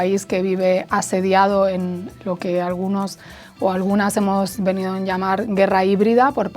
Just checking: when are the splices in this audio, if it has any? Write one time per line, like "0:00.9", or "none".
none